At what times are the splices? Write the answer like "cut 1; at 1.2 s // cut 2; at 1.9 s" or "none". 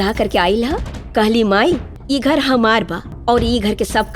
cut 1; at 1.9 s // cut 2; at 3.0 s